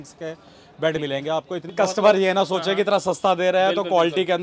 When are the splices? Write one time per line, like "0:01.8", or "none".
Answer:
0:01.7